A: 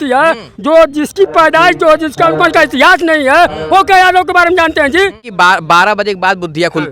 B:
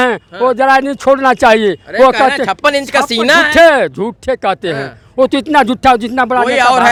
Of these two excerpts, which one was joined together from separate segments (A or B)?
A